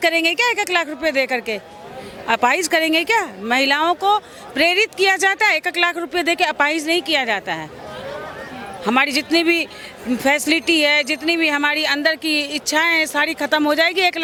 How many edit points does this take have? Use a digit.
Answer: 0